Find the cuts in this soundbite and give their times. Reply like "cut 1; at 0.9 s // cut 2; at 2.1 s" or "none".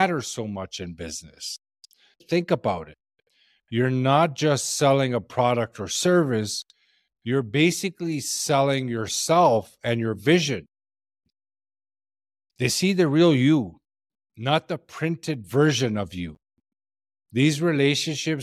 cut 1; at 2.2 s